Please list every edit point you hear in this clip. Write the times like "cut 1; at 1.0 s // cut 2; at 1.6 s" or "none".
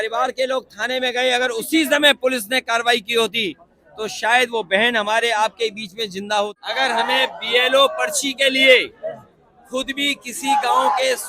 cut 1; at 6.6 s